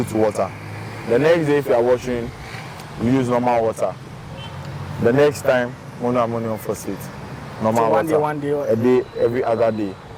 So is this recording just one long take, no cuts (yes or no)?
yes